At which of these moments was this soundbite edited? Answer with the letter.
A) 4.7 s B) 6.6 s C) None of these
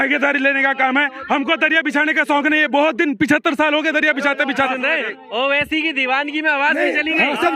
A